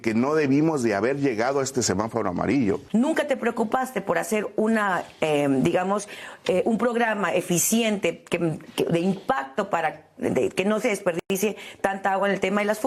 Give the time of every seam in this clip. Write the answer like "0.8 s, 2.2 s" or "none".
2.8 s